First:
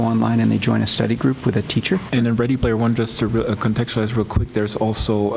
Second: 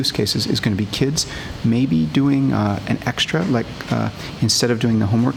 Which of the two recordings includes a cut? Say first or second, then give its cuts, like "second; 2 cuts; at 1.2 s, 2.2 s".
first; 1 cut; at 2.1 s